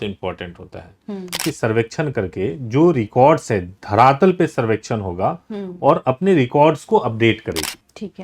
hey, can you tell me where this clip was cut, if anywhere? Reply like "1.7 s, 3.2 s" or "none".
1.4 s